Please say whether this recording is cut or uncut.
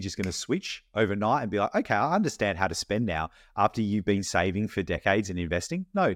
uncut